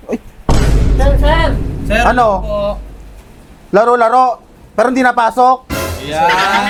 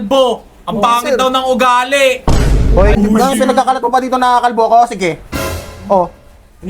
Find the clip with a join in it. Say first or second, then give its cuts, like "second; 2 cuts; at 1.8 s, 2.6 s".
second; 1 cut; at 3.0 s